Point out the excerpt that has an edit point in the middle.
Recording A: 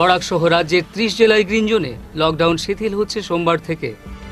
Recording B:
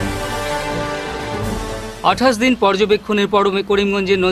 B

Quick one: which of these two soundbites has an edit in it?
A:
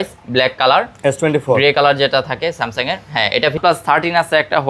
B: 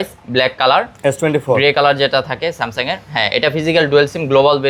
A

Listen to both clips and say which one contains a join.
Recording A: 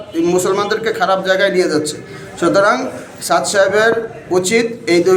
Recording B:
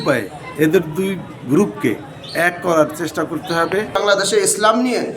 B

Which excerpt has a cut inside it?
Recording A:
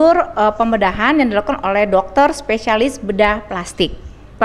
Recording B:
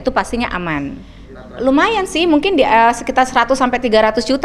B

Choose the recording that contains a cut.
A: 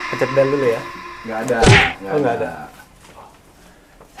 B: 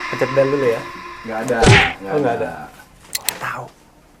B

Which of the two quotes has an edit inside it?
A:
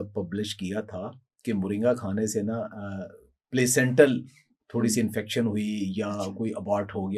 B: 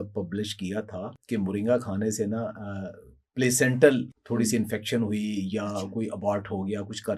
B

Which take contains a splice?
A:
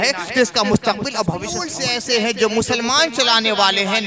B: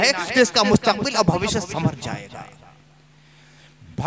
A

